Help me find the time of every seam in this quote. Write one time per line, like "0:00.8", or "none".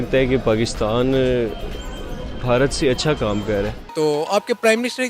0:03.8